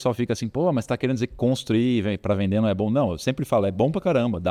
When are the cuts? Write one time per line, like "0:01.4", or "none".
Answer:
none